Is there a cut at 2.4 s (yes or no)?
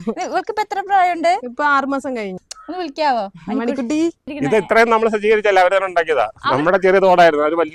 yes